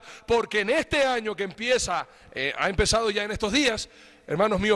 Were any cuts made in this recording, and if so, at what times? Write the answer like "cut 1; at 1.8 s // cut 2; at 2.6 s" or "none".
none